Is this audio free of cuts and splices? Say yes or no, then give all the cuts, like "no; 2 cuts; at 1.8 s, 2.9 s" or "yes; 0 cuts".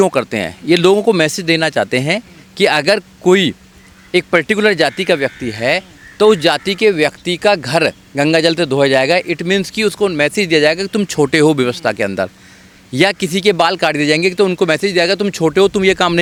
yes; 0 cuts